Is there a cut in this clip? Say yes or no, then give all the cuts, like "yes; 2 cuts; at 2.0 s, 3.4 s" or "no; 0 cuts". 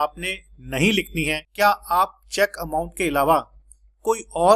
yes; 1 cut; at 1.4 s